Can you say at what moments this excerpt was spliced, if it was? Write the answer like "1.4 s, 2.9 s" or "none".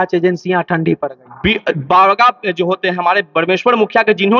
none